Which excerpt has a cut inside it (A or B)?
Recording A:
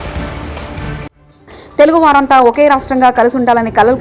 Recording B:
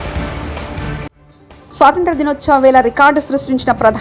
A